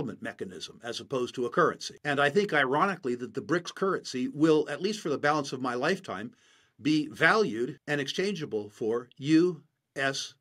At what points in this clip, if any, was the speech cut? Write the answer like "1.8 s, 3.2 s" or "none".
1.9 s, 7.8 s

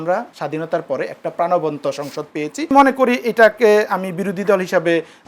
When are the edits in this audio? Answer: 2.7 s

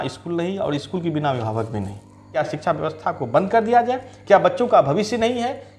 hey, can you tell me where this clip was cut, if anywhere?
2.3 s

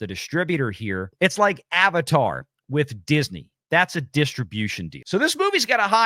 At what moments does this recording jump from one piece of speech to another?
1.1 s, 4.9 s

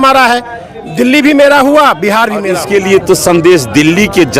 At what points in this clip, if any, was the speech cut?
2.4 s

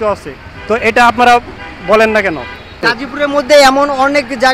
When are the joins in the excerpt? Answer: 3.0 s

